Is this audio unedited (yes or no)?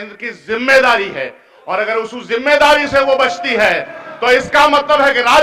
yes